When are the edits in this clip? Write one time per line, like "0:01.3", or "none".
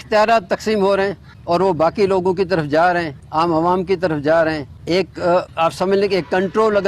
0:01.3
0:03.2
0:04.7
0:05.5